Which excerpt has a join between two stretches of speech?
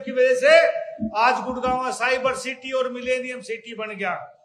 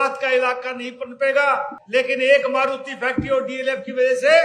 second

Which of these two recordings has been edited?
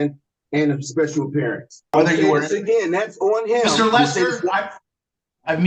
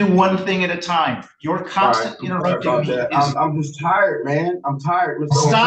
first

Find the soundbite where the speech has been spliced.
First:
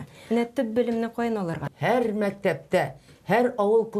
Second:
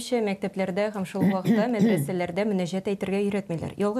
first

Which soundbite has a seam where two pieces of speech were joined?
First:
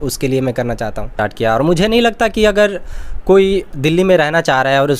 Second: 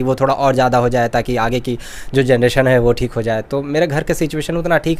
first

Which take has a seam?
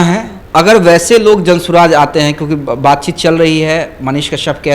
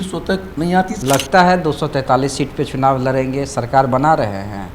second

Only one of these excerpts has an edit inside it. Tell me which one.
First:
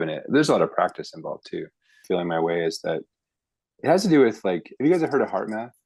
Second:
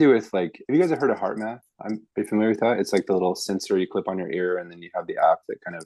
first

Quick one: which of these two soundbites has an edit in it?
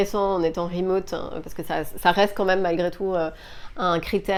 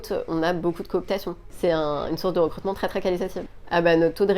second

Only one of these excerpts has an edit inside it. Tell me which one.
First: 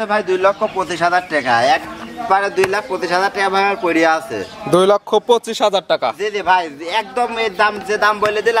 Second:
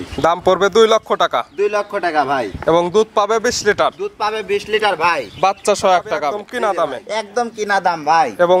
second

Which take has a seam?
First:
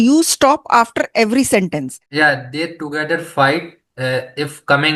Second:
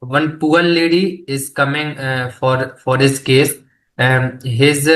first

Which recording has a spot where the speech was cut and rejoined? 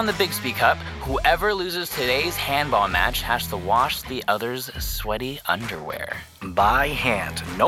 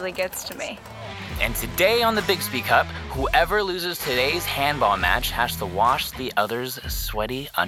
second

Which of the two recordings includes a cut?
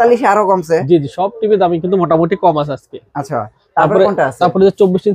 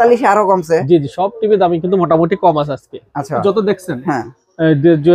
second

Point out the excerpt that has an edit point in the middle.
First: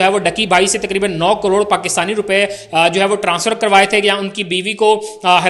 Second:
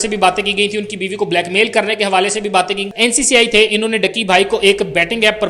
second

